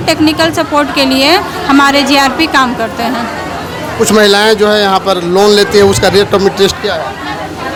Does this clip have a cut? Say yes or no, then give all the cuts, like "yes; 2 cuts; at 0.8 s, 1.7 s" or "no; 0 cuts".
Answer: no; 0 cuts